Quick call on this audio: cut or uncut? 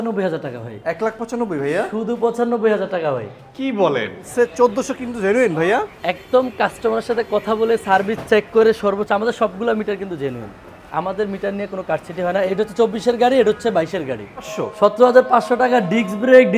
cut